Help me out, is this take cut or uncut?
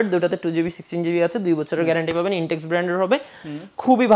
uncut